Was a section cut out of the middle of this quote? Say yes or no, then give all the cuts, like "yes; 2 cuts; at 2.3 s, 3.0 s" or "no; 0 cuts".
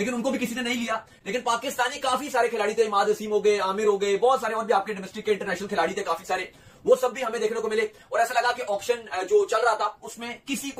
no; 0 cuts